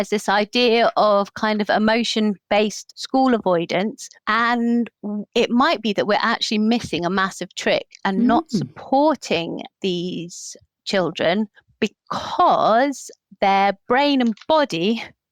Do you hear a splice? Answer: no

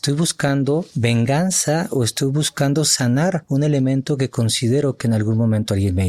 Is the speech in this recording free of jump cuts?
no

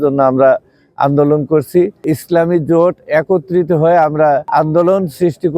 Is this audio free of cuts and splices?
no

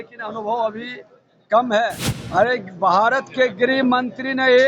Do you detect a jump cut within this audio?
yes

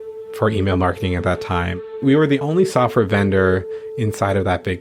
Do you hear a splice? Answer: yes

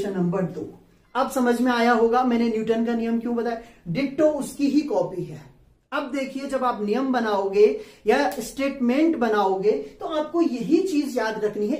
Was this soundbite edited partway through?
no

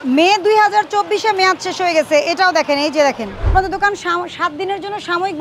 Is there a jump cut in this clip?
yes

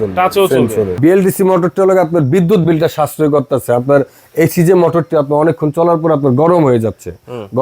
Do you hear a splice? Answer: yes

